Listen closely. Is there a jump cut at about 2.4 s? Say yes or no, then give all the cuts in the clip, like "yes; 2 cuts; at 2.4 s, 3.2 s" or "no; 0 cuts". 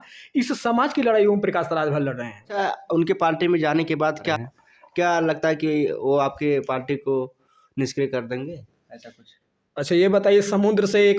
yes; 1 cut; at 2.4 s